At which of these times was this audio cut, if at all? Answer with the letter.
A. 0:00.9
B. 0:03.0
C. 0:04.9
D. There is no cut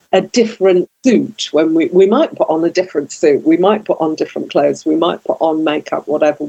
A